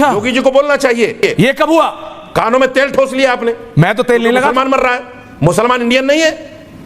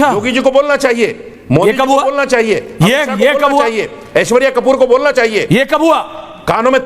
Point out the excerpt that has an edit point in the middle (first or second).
first